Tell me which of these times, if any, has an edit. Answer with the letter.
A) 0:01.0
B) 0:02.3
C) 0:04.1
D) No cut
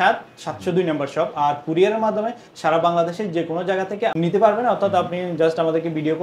C